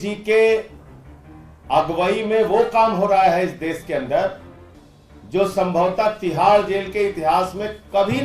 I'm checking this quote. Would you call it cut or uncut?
uncut